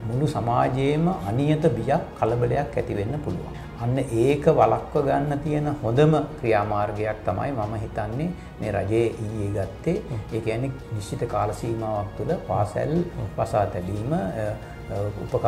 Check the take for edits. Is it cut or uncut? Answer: cut